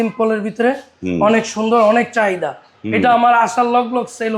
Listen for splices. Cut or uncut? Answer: uncut